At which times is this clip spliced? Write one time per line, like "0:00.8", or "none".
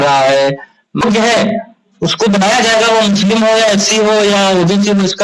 0:01.0